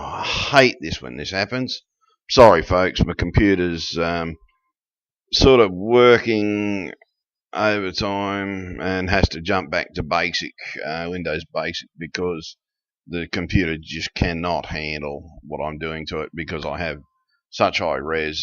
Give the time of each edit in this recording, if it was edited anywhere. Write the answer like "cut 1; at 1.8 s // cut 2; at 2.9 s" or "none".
cut 1; at 4.0 s